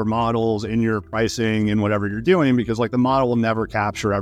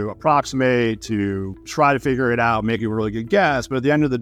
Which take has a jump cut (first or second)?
second